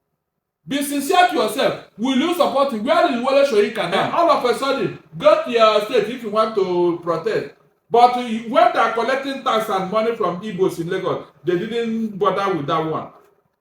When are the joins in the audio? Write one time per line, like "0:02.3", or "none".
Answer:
0:04.0